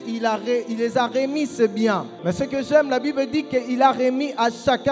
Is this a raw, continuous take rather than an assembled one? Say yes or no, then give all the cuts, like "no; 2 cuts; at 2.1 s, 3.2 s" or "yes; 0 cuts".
no; 1 cut; at 2.1 s